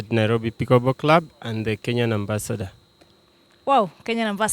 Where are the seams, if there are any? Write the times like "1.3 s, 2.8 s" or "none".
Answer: none